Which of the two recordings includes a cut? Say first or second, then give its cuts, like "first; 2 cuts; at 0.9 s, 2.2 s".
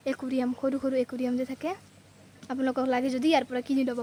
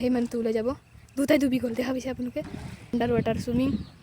second; 1 cut; at 2.9 s